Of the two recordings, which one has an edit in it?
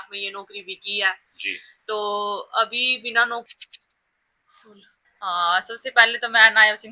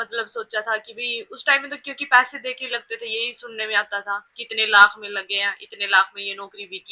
first; 1 cut; at 3.5 s

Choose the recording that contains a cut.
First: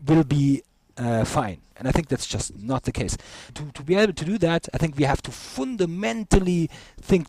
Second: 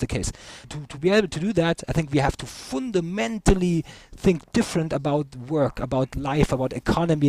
first; 1 cut; at 1.7 s

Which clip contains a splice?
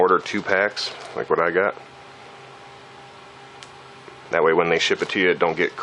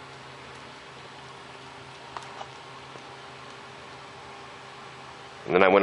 second; 1 cut; at 3.1 s

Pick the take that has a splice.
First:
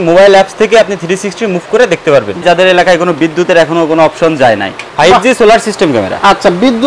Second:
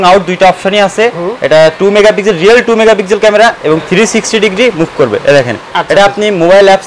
first; 2 cuts; at 2.4 s, 4.8 s

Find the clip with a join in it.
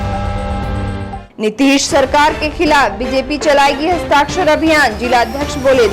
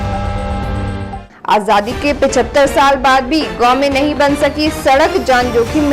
second; 1 cut; at 1.2 s

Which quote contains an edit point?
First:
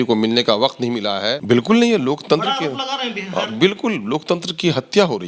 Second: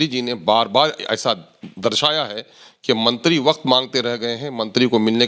first; 1 cut; at 1.4 s

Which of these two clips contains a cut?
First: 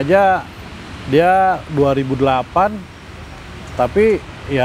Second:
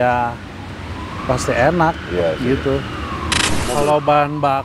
second; 1 cut; at 3.6 s

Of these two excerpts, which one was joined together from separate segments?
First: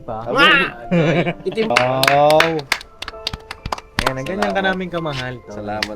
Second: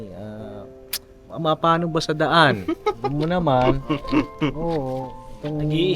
first; 1 cut; at 1.7 s

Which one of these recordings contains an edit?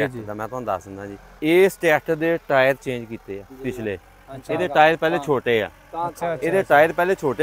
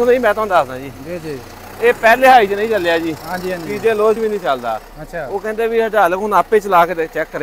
first; 2 cuts; at 1.2 s, 3.5 s

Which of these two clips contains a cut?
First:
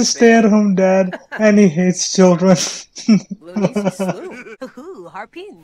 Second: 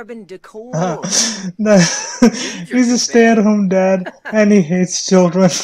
first; 1 cut; at 4.5 s

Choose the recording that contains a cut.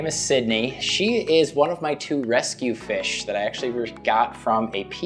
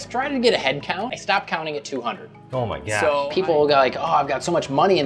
second; 2 cuts; at 1.1 s, 3.2 s

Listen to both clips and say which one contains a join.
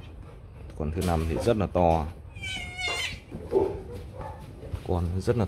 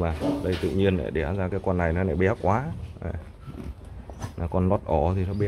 first; 1 cut; at 3.4 s

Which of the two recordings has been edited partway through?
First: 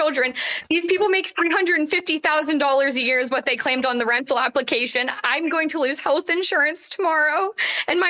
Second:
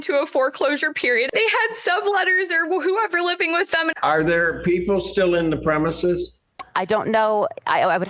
second; 2 cuts; at 1.3 s, 3.9 s

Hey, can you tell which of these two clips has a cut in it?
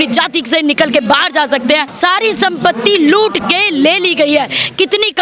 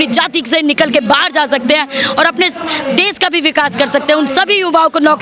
first; 1 cut; at 1.9 s

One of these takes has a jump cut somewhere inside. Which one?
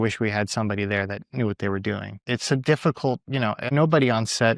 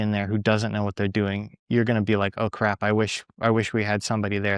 first; 2 cuts; at 2.1 s, 3.6 s

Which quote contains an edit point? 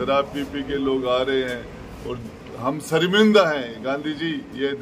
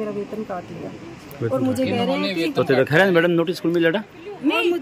first; 1 cut; at 2.2 s

